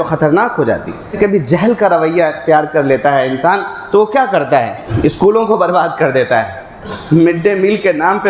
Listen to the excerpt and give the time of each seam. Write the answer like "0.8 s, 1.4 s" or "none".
1.1 s, 4.8 s